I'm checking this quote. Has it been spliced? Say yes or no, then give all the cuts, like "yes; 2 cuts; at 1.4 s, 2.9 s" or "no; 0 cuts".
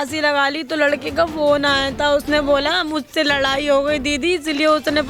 no; 0 cuts